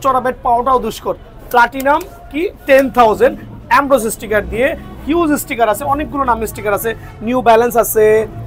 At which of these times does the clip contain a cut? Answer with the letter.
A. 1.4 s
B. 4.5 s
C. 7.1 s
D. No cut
D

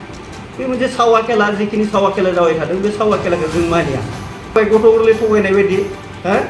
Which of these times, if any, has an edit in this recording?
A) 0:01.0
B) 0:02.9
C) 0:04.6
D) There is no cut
C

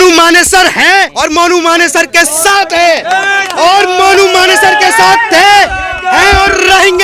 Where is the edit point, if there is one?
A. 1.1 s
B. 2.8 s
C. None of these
A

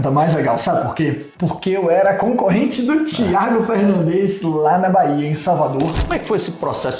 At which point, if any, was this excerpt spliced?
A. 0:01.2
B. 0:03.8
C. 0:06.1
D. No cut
C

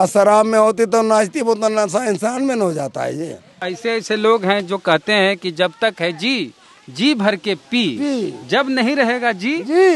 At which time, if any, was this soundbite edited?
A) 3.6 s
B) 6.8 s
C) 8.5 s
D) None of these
A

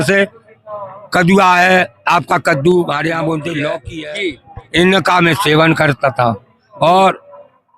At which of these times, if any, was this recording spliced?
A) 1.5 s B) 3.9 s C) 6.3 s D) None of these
B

